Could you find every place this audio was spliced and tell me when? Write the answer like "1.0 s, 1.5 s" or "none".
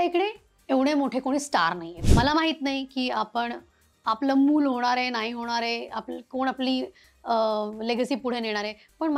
1.9 s